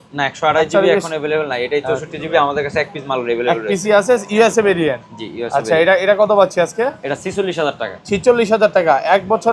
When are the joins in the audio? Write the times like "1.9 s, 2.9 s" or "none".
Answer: none